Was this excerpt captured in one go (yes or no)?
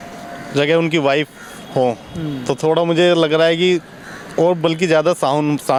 yes